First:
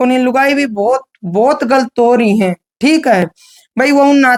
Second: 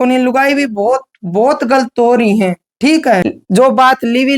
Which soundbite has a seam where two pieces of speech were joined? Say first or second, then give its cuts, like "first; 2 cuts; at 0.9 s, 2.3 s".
second; 1 cut; at 3.2 s